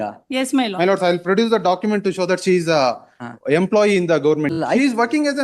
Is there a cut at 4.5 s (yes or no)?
yes